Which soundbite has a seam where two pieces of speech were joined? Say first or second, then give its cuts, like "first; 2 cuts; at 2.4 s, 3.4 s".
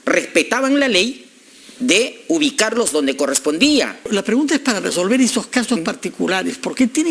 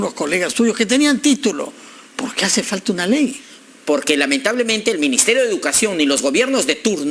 first; 1 cut; at 4.1 s